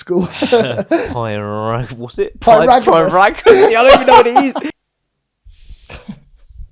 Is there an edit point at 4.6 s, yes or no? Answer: yes